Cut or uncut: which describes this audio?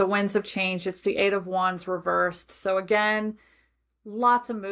uncut